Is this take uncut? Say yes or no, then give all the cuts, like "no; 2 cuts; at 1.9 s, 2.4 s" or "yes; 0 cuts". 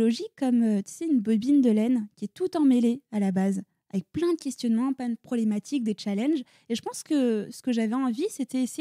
yes; 0 cuts